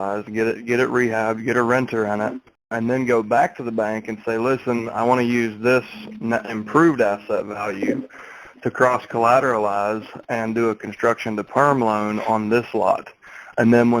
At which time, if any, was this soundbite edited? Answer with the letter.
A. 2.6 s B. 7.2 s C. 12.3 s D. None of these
A